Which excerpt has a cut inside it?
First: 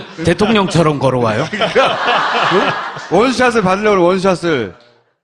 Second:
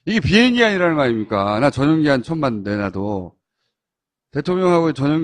first; 1 cut; at 3.5 s

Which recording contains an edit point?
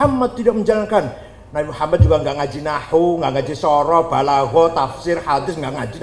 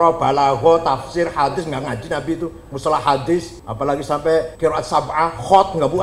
second; 2 cuts; at 3.6 s, 4.5 s

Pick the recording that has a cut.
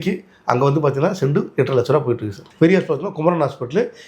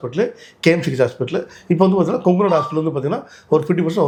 first; 1 cut; at 2.4 s

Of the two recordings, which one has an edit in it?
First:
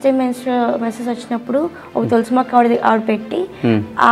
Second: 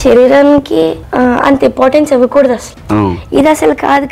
second; 2 cuts; at 1.0 s, 2.7 s

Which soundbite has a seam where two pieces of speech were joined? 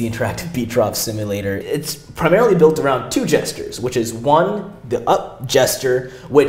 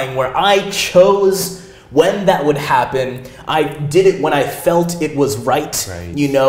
first; 1 cut; at 1.6 s

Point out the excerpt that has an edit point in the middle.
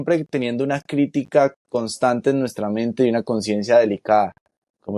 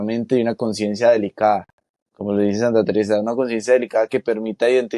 first; 1 cut; at 1.6 s

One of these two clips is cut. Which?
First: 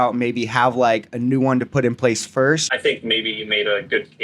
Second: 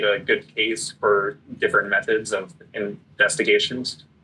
first; 1 cut; at 2.7 s

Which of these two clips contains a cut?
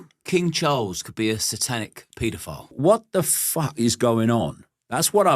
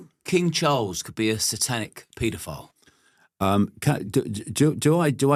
first; 1 cut; at 2.7 s

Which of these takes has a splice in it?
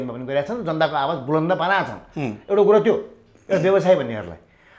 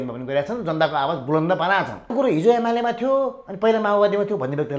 second; 1 cut; at 2.1 s

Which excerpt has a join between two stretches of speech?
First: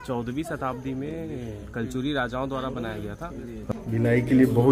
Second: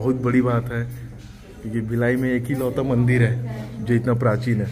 first; 1 cut; at 3.6 s

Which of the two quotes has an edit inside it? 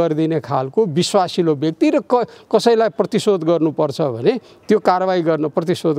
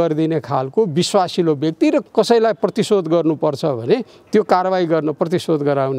second; 1 cut; at 2.0 s

